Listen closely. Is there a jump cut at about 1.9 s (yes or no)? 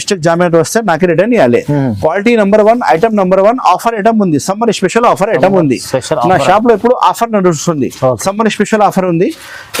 no